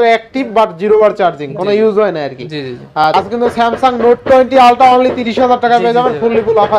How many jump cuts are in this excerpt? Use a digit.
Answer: 1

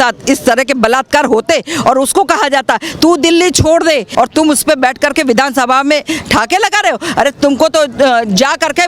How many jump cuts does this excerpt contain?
1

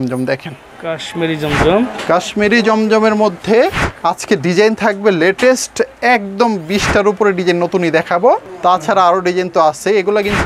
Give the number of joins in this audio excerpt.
2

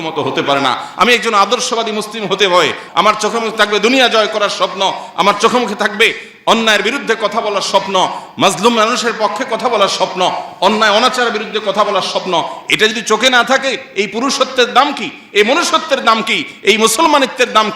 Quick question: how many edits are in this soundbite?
1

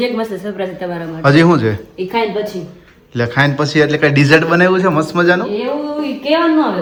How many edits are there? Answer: 0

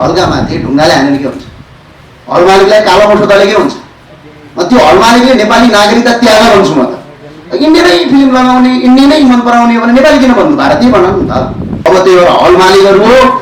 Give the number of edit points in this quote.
1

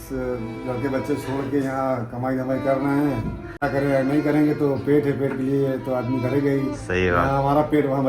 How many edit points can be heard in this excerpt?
1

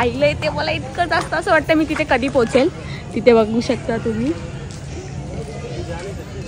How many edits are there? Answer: 0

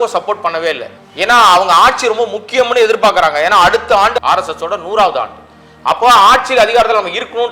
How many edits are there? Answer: 2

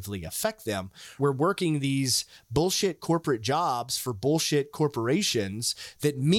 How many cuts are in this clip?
1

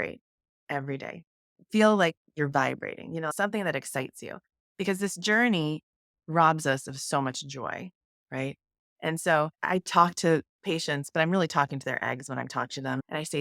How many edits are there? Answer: 2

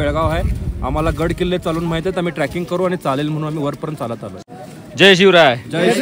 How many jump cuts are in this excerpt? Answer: 1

